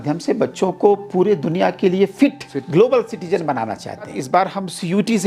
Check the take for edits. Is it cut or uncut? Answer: cut